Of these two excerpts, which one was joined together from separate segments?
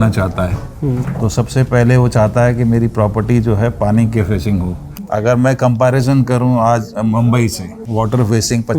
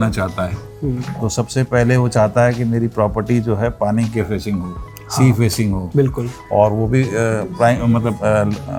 first; 2 cuts; at 4.9 s, 7.8 s

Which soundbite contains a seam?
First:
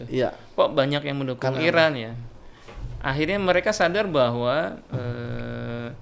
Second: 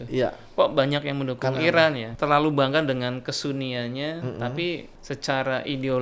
second; 2 cuts; at 2.1 s, 4.9 s

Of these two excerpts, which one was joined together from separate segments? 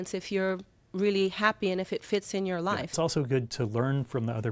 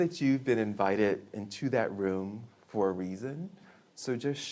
first; 1 cut; at 2.9 s

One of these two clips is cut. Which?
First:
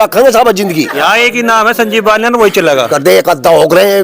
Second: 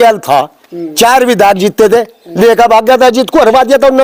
first; 2 cuts; at 0.9 s, 2.9 s

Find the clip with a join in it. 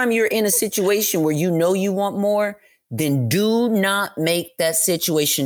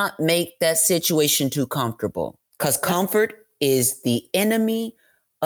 second; 1 cut; at 2.4 s

